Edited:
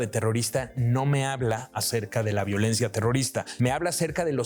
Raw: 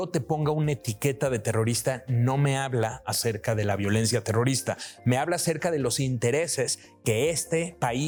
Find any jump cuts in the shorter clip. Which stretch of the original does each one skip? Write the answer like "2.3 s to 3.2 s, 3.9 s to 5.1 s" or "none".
4.8 s to 5.0 s